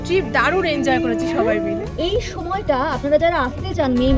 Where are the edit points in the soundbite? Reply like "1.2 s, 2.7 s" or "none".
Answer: 1.8 s

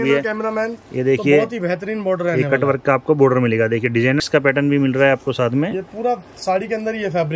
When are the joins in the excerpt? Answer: 4.2 s

